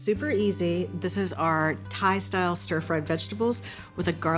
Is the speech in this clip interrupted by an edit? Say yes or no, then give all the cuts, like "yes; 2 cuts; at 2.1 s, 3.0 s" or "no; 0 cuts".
no; 0 cuts